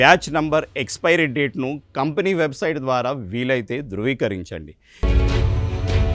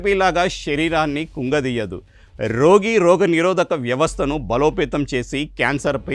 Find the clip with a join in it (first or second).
first